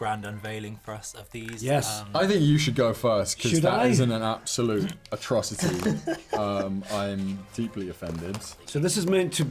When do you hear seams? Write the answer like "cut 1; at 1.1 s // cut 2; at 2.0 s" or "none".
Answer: none